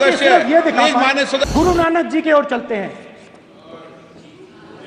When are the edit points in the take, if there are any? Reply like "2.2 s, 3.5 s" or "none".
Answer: 1.4 s